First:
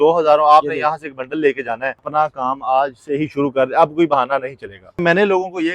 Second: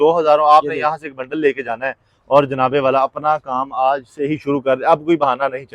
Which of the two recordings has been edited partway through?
first; 2 cuts; at 2.1 s, 5.0 s

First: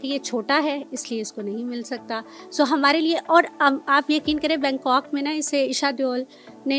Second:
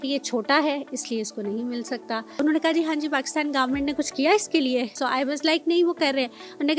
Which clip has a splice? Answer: second; 2 cuts; at 2.3 s, 4.9 s

